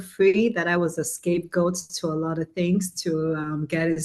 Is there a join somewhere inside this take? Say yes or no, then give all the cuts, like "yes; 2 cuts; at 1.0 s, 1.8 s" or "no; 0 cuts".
no; 0 cuts